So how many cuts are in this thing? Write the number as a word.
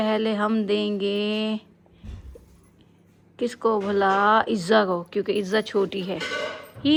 zero